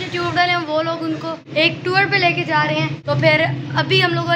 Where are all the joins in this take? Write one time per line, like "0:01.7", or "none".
0:01.4
0:03.0